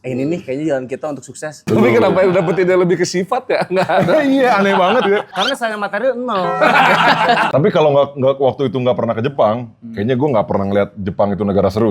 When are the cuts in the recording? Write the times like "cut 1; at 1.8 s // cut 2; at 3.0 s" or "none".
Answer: cut 1; at 7.5 s